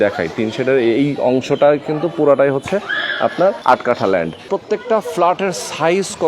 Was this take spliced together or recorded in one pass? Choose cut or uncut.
cut